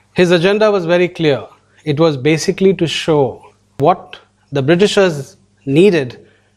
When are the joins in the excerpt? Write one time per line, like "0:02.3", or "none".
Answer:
0:03.8